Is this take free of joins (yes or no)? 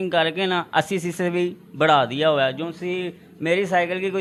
yes